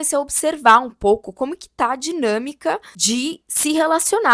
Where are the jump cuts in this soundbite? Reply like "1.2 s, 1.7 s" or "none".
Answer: 2.9 s